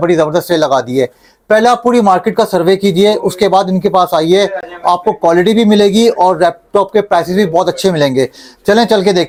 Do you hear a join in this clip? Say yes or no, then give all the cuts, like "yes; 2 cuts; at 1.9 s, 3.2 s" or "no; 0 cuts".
no; 0 cuts